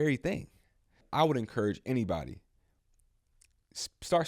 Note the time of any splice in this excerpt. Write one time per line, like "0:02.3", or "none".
0:01.0